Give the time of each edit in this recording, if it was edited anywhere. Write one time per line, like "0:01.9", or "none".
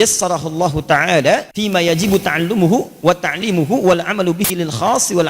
0:01.6